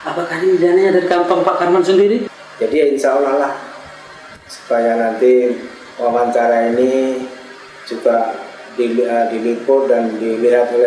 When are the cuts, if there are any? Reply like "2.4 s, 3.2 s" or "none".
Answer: 2.3 s